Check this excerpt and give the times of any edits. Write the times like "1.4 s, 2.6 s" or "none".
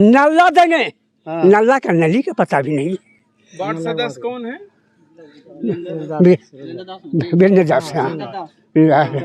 none

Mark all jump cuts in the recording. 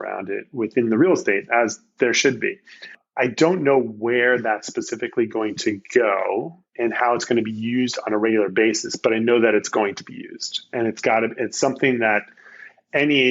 3.0 s

